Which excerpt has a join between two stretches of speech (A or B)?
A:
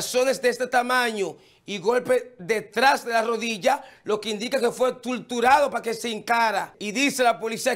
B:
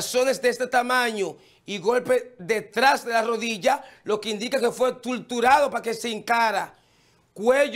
A